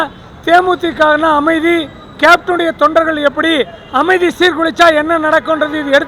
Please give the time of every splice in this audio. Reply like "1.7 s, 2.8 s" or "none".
none